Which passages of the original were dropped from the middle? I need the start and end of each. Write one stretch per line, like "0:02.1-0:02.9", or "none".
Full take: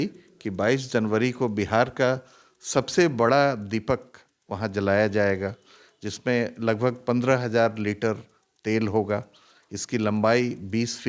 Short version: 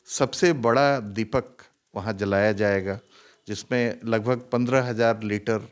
none